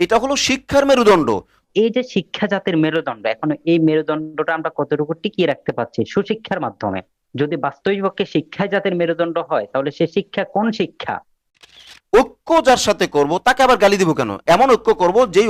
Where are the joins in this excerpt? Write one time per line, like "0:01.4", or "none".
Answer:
0:01.6
0:11.8
0:14.4